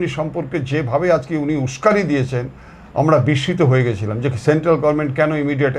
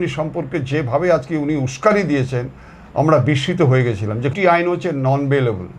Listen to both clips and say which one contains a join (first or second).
second